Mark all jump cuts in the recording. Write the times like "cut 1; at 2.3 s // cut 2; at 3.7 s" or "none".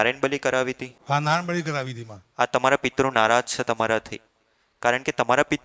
cut 1; at 0.9 s